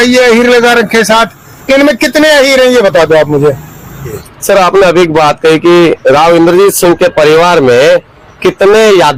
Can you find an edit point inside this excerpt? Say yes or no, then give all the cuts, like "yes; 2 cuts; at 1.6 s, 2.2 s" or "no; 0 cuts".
no; 0 cuts